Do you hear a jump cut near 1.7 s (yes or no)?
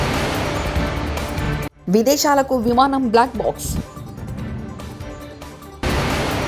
yes